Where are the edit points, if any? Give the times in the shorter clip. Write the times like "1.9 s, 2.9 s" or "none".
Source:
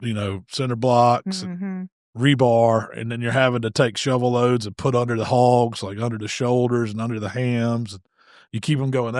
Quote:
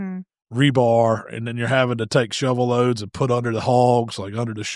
none